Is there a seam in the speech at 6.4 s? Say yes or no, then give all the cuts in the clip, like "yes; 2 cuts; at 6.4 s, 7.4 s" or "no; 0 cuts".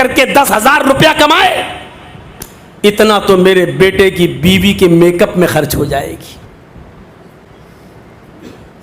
yes; 1 cut; at 6.4 s